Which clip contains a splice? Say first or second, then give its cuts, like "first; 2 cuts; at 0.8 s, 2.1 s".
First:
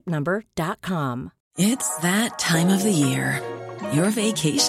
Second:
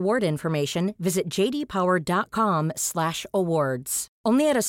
first; 1 cut; at 1.4 s